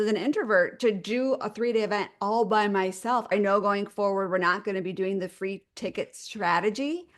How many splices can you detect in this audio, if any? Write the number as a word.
one